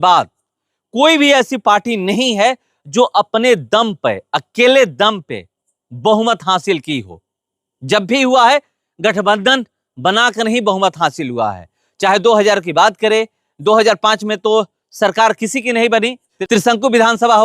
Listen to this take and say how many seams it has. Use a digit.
0